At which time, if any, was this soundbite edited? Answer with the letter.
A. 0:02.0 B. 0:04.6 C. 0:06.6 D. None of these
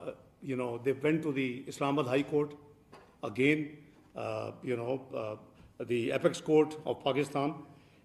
D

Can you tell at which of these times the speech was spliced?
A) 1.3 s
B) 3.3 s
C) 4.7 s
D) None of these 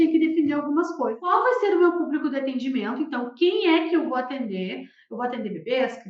A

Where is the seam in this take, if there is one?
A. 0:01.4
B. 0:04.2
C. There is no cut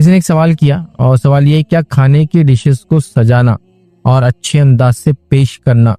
C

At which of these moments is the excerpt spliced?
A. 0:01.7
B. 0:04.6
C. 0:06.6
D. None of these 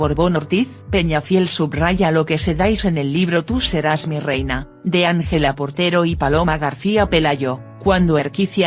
A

